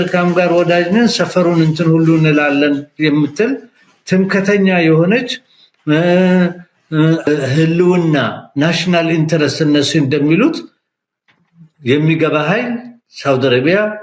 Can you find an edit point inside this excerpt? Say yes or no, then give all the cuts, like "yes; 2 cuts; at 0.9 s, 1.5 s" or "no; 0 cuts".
no; 0 cuts